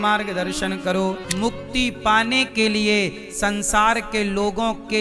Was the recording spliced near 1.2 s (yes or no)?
yes